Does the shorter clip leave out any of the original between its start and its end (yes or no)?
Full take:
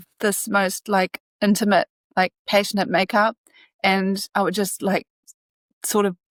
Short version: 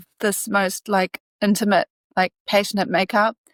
no